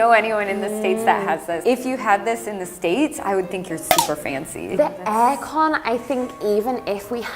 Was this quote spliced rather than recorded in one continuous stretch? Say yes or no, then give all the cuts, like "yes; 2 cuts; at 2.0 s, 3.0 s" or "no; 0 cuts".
yes; 2 cuts; at 1.6 s, 4.8 s